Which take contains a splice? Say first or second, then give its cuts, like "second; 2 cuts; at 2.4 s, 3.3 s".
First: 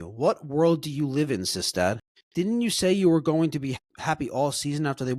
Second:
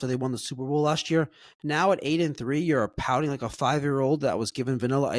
first; 2 cuts; at 2.1 s, 3.8 s